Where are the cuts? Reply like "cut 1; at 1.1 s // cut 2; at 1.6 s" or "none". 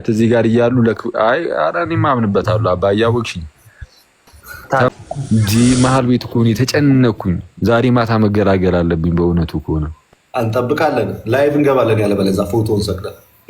cut 1; at 4.9 s

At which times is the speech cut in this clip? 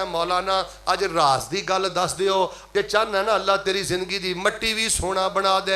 cut 1; at 2.6 s

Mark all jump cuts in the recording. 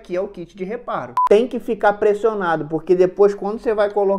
cut 1; at 1.1 s

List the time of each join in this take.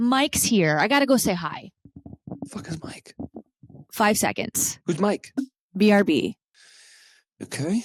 none

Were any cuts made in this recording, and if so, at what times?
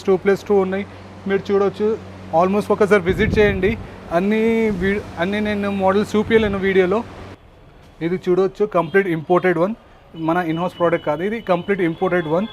cut 1; at 7.2 s

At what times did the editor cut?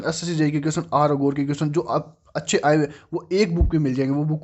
none

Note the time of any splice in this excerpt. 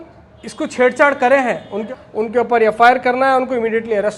cut 1; at 1.9 s

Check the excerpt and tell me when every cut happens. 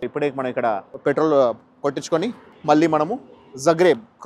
cut 1; at 0.9 s // cut 2; at 2.5 s

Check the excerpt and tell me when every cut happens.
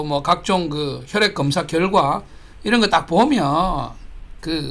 none

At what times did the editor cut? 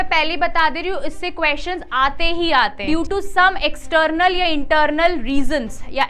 cut 1; at 2.8 s

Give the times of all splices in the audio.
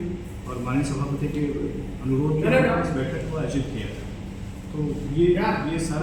none

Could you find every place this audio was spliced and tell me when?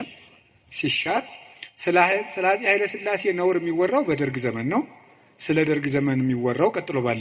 none

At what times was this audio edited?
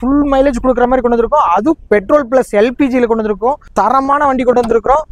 cut 1; at 3.6 s

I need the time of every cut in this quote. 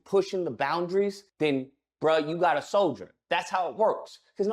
cut 1; at 3.1 s

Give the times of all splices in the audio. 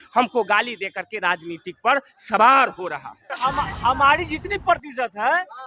cut 1; at 3.3 s

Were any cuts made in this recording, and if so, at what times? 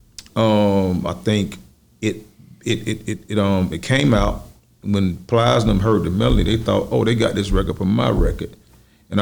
none

